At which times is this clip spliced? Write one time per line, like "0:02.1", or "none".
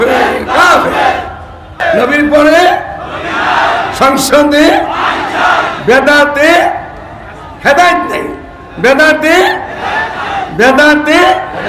0:01.8